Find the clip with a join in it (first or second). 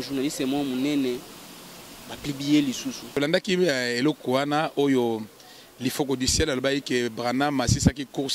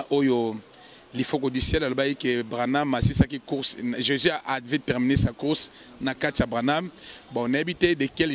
first